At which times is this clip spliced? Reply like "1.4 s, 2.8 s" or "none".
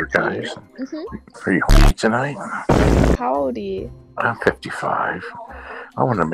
1.2 s